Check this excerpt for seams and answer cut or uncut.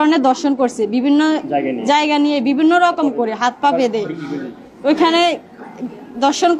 uncut